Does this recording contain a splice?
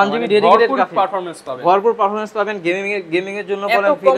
no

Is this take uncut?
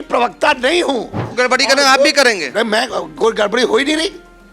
no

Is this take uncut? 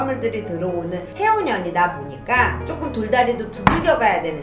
no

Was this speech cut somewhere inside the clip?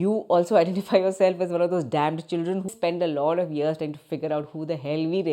yes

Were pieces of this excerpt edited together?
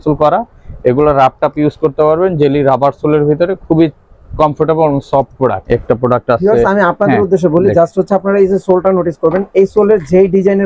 yes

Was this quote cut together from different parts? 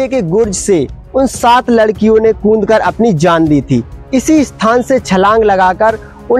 no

